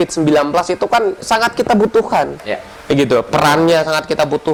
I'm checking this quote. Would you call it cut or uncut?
uncut